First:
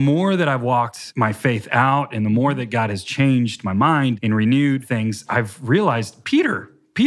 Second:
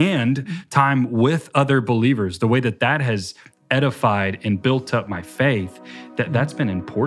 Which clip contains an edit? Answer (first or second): first